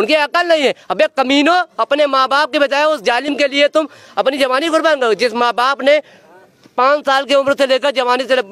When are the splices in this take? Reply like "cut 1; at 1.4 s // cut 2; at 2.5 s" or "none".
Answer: none